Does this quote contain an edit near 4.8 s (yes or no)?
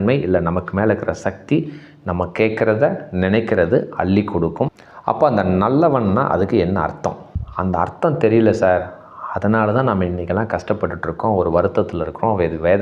yes